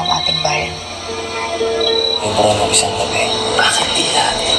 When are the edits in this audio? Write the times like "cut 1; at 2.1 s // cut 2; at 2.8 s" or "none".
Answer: cut 1; at 2.2 s